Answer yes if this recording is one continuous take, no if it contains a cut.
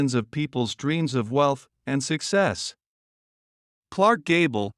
yes